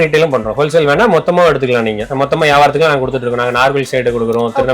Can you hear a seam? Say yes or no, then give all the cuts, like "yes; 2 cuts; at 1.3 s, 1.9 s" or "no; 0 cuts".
yes; 1 cut; at 2.0 s